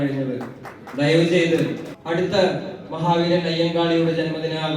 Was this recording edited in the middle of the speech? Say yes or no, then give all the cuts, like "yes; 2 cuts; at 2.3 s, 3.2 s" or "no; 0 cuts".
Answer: yes; 1 cut; at 1.9 s